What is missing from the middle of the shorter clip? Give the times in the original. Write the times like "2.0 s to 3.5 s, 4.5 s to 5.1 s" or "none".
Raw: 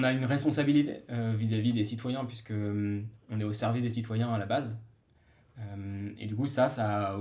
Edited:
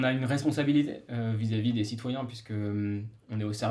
none